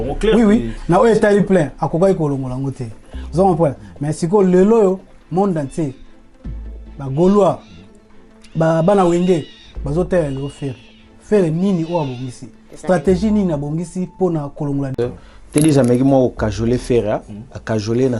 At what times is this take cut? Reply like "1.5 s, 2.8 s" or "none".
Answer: 14.9 s